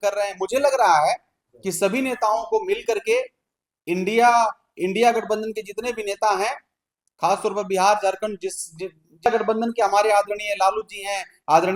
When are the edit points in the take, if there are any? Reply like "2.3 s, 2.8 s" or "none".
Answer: 9.3 s